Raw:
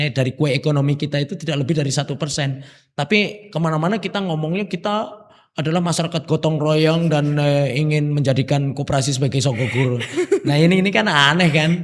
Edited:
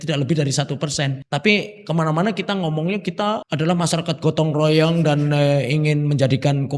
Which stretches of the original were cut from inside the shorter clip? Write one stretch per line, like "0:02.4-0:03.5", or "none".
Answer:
0:02.6-0:02.8
0:05.1-0:05.5